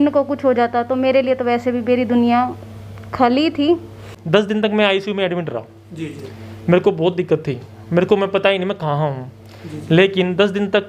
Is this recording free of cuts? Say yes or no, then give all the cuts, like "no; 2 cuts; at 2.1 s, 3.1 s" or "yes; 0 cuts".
no; 1 cut; at 4.1 s